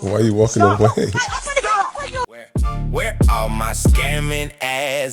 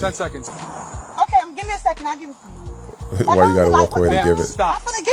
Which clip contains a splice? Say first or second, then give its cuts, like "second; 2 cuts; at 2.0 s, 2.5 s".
first; 1 cut; at 2.3 s